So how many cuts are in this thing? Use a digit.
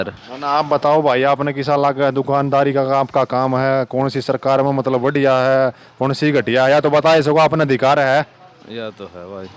0